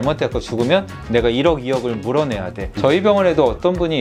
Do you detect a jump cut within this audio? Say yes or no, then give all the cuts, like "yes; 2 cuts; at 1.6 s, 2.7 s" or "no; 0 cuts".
no; 0 cuts